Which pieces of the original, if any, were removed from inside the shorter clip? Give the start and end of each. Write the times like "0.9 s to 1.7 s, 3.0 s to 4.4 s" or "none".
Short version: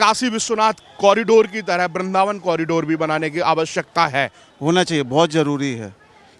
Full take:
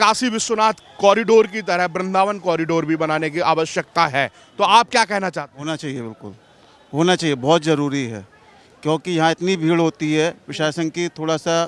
4.4 s to 6.7 s